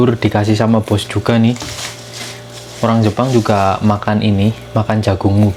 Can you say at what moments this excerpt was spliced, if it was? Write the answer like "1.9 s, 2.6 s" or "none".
none